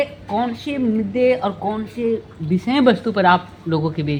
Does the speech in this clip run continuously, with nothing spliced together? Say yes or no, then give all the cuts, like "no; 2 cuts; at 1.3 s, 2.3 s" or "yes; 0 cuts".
yes; 0 cuts